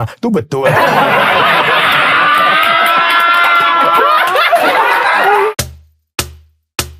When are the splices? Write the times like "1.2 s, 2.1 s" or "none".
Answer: 5.6 s